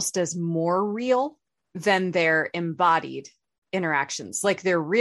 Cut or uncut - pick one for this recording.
cut